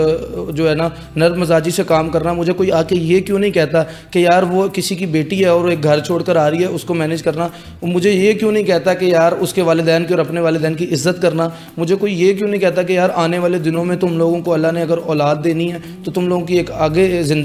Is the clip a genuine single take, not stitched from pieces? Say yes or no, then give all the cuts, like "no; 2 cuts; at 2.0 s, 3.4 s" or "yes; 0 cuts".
yes; 0 cuts